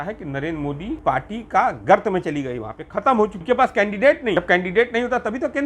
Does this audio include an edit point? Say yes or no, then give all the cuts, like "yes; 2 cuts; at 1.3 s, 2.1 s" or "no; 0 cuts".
yes; 3 cuts; at 1.0 s, 3.4 s, 4.4 s